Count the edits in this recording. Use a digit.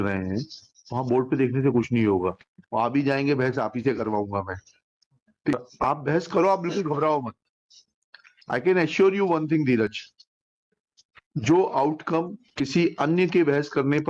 1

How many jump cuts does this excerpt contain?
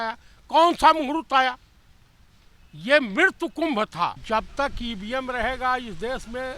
1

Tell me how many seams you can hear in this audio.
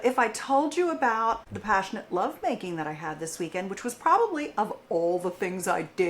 1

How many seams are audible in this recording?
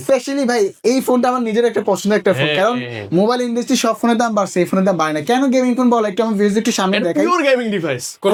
0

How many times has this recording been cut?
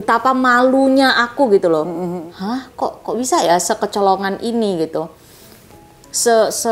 1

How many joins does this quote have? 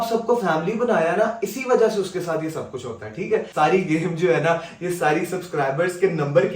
1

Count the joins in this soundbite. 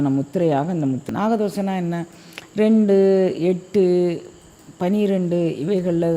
1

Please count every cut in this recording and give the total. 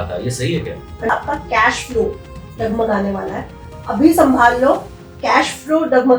1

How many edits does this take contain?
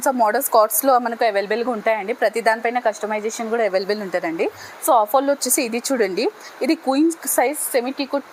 0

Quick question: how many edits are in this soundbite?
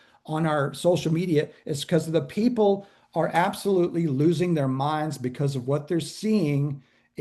0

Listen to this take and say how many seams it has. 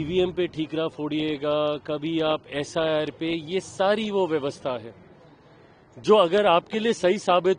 0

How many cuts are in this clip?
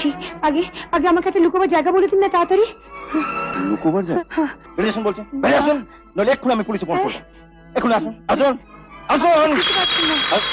2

